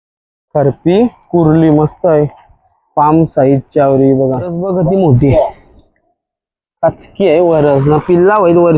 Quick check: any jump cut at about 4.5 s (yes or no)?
yes